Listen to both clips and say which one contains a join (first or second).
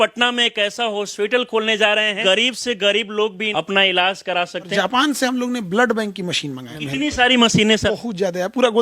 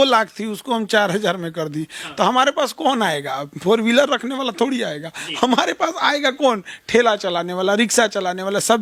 first